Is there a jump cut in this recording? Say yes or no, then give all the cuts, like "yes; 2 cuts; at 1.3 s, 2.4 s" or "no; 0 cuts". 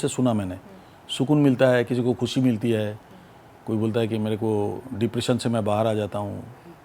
no; 0 cuts